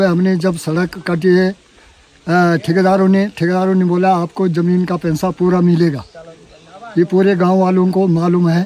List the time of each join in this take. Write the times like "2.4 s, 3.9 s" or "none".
none